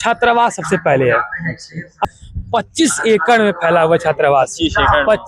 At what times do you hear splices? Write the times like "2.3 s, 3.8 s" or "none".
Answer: 2.0 s